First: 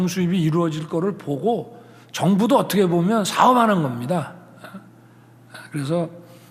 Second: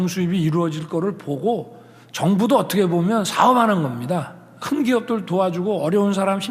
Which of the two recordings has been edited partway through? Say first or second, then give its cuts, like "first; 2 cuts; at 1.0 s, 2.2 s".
second; 1 cut; at 4.5 s